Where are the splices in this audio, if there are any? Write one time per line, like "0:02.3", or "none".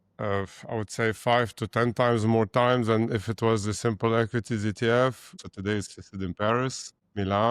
0:05.4